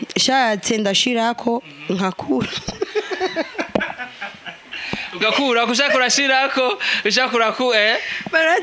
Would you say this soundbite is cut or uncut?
uncut